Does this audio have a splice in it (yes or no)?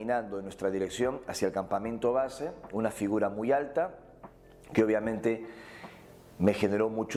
no